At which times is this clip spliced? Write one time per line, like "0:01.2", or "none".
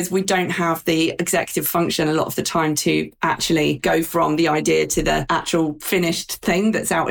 0:03.8
0:05.6